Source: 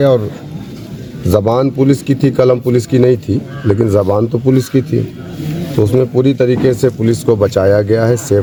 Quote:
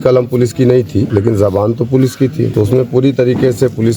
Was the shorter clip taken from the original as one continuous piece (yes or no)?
no